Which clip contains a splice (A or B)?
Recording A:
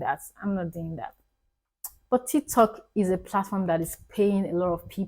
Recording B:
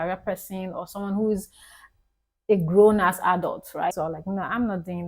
B